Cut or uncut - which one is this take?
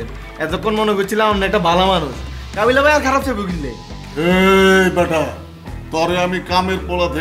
uncut